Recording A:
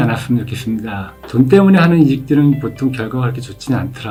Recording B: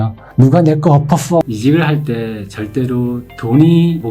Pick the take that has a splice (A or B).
B